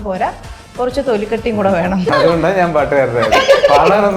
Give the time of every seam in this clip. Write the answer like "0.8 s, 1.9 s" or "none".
2.1 s

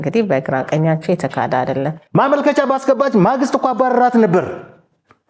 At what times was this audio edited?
2.0 s

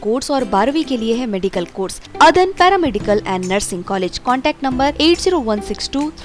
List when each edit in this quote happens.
2.0 s

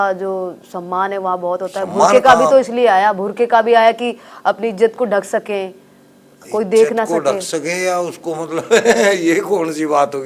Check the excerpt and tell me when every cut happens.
none

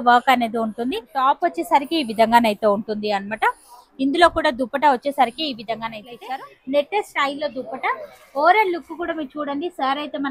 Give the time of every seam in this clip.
1.1 s, 6.1 s

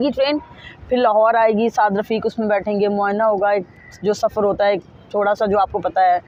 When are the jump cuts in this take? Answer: none

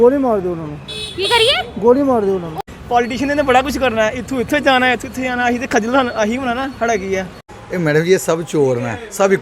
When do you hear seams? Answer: 2.6 s, 7.4 s

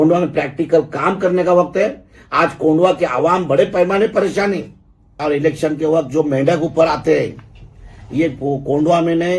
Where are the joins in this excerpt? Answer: 5.1 s

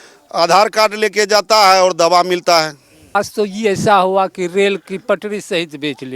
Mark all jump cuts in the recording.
3.1 s

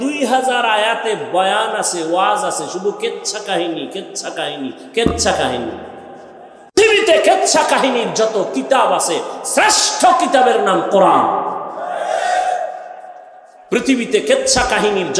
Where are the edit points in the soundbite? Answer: 6.8 s

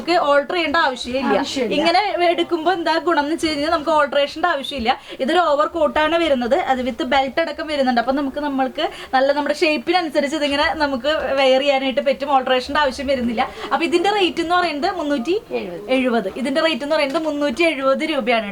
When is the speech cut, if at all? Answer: none

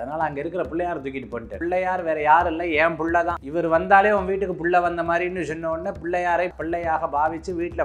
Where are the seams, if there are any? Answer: 1.6 s, 3.4 s, 6.6 s

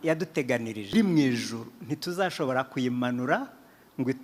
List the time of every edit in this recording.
0.9 s

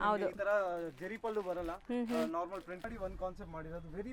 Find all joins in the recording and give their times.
2.9 s

